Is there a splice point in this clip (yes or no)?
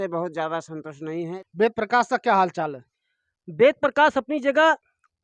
yes